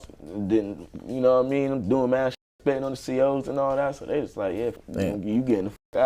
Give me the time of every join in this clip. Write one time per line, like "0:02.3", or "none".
0:04.8